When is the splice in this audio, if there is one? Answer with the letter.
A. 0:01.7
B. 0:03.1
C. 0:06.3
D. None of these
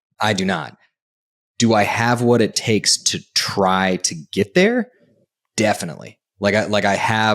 D